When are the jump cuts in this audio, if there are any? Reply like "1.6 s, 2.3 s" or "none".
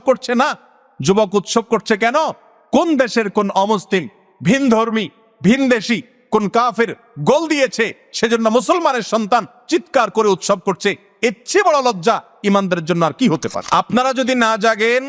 13.5 s